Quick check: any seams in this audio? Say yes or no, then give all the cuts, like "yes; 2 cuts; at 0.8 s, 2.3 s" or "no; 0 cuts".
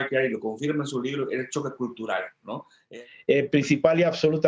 yes; 1 cut; at 2.9 s